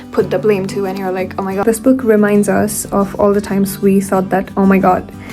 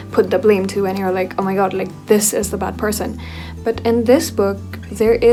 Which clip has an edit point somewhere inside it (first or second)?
first